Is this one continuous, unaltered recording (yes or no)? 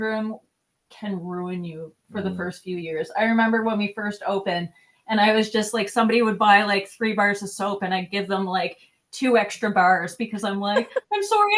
yes